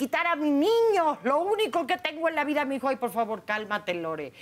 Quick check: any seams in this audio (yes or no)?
no